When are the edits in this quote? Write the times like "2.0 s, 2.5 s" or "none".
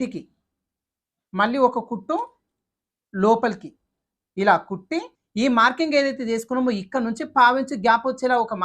5.2 s

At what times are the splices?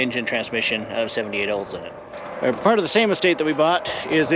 2.2 s

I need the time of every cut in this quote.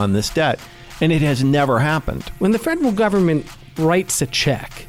2.2 s

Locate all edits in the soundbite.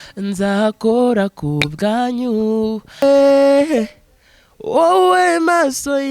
3.0 s

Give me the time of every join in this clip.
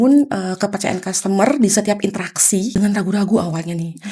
2.8 s

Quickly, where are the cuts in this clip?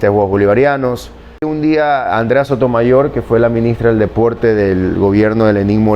1.5 s

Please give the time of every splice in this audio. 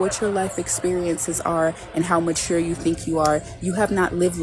none

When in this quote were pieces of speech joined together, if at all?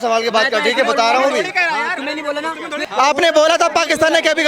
2.8 s

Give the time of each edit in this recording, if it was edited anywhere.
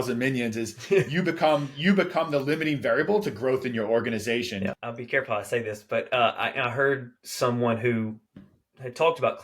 4.9 s

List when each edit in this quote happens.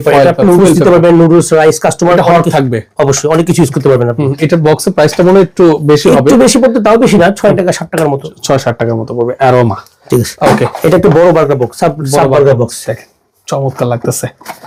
none

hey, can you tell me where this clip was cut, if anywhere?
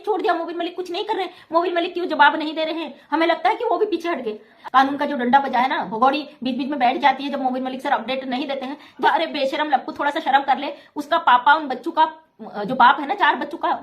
4.5 s, 9.0 s

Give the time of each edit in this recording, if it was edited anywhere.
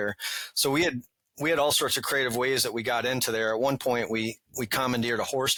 none

